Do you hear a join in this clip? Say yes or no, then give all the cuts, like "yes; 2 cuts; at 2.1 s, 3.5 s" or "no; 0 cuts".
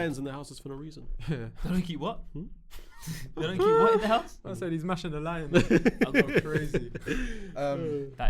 no; 0 cuts